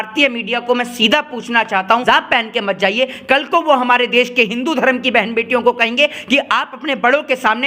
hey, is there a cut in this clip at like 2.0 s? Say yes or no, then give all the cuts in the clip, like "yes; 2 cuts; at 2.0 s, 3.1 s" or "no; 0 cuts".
yes; 1 cut; at 2.0 s